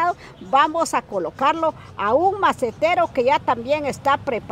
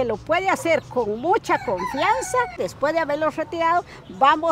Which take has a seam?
second; 1 cut; at 2.6 s

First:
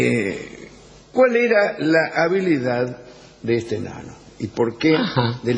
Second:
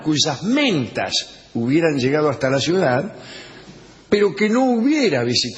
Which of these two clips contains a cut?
second; 1 cut; at 2.7 s

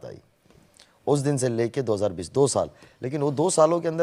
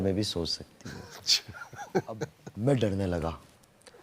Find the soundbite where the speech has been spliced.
second; 1 cut; at 2.4 s

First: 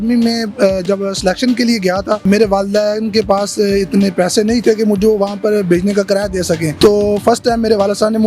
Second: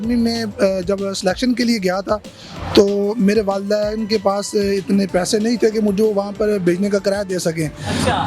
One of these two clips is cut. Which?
first; 2 cuts; at 2.2 s, 6.8 s

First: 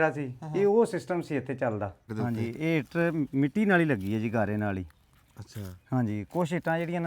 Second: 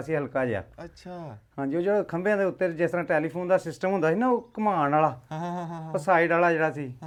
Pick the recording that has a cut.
first; 1 cut; at 2.1 s

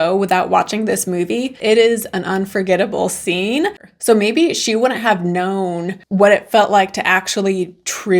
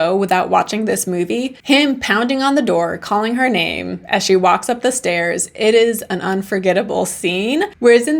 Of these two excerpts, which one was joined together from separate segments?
first; 2 cuts; at 1.5 s, 3.8 s

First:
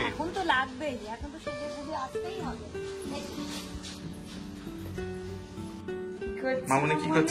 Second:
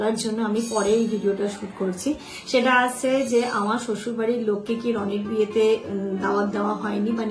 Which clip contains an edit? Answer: first; 1 cut; at 6.4 s

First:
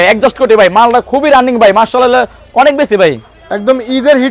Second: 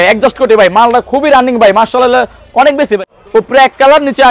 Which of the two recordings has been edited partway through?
second; 1 cut; at 3.0 s

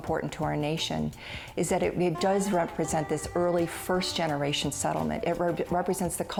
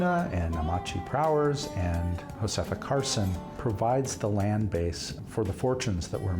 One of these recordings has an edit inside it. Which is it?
second; 3 cuts; at 2.2 s, 3.5 s, 5.1 s

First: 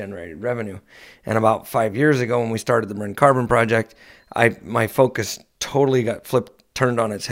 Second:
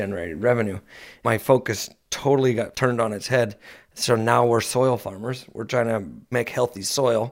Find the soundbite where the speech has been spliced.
second; 3 cuts; at 1.1 s, 2.7 s, 6.3 s

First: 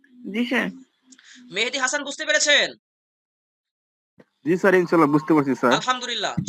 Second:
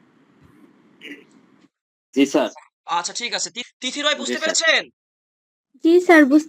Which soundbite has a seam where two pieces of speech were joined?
second; 1 cut; at 3.6 s

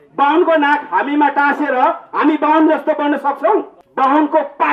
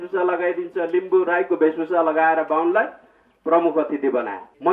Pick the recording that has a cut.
first; 1 cut; at 3.8 s

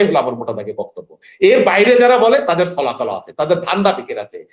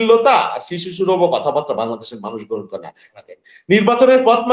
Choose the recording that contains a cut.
second; 1 cut; at 3.1 s

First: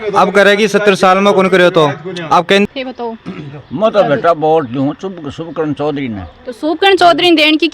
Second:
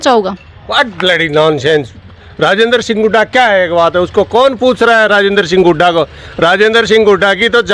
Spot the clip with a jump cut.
first; 1 cut; at 2.7 s

